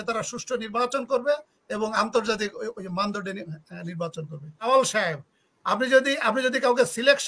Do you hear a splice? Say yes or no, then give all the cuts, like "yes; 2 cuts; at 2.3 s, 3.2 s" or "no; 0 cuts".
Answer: yes; 1 cut; at 4.6 s